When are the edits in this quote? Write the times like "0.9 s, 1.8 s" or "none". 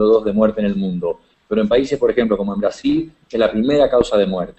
none